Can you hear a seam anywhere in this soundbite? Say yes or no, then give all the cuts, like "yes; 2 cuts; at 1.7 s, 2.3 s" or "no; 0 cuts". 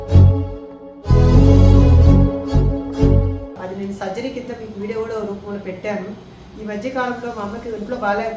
no; 0 cuts